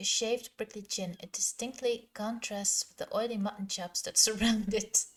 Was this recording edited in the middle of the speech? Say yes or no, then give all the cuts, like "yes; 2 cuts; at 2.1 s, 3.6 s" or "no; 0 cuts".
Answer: no; 0 cuts